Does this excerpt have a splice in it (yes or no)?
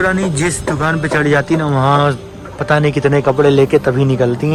no